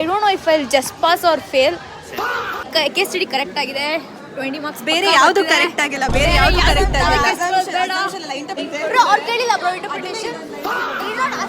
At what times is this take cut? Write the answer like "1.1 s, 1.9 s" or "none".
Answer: 2.7 s, 8.6 s